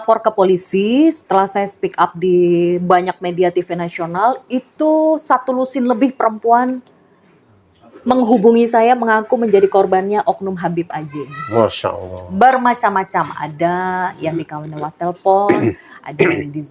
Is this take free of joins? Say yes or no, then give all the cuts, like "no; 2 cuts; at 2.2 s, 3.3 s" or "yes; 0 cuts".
yes; 0 cuts